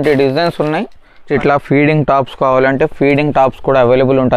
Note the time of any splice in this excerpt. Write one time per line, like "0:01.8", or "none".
0:01.2